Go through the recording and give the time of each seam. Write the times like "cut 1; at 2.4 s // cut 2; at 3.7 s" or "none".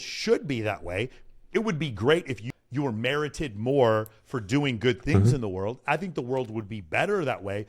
cut 1; at 2.5 s